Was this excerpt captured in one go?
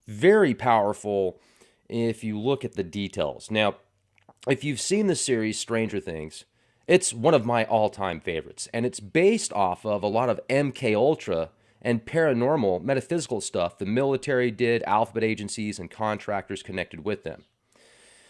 no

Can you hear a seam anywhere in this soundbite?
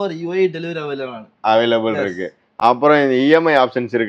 no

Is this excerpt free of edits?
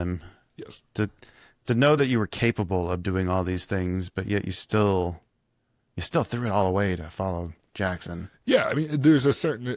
yes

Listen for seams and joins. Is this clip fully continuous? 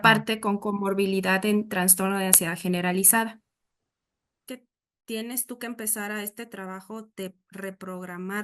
no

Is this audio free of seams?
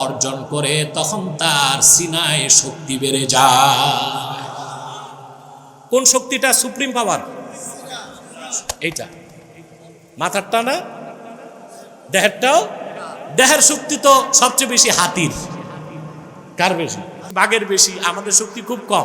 no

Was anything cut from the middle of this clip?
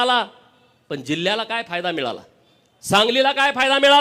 no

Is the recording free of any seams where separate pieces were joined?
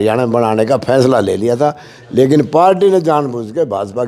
yes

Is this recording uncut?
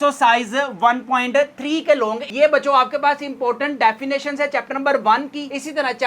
no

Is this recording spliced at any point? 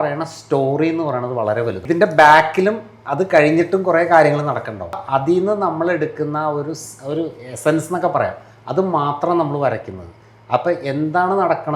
yes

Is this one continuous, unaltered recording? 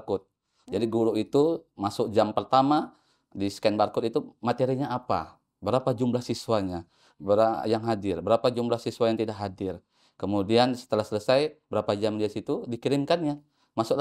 yes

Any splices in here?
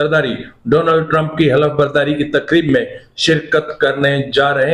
no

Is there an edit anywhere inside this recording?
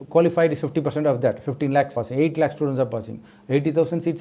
yes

